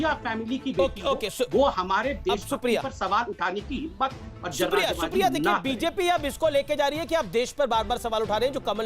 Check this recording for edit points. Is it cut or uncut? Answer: uncut